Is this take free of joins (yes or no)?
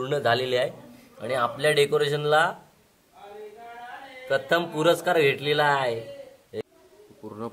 no